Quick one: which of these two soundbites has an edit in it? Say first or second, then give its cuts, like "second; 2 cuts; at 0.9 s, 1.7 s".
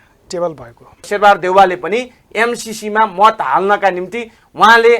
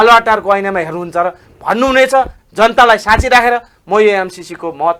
first; 1 cut; at 1.0 s